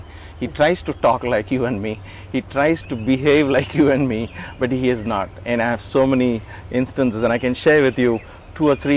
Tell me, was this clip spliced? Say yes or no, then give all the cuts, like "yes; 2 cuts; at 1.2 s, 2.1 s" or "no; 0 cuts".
no; 0 cuts